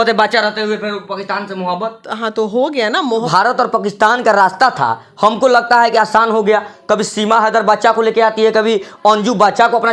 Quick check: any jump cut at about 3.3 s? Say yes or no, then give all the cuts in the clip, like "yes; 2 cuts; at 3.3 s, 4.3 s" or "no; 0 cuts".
yes; 1 cut; at 3.3 s